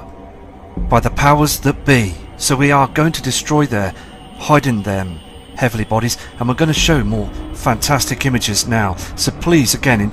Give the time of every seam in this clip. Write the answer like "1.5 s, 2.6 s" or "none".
2.7 s